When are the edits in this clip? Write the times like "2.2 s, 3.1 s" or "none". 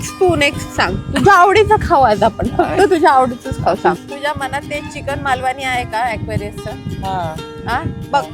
4.0 s